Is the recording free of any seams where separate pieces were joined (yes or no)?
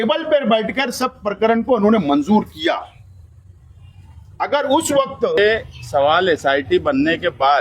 no